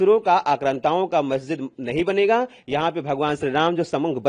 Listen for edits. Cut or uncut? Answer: uncut